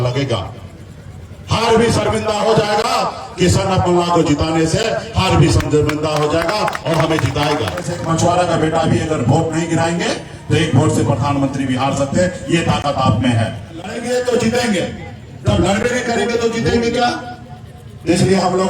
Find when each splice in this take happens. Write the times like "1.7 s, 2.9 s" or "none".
8.0 s, 14.0 s